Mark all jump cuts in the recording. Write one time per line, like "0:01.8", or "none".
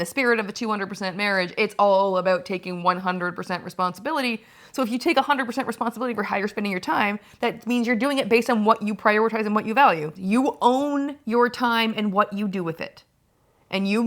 0:10.1